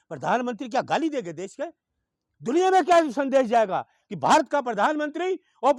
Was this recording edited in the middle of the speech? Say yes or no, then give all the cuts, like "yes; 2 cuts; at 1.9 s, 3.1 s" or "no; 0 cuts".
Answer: no; 0 cuts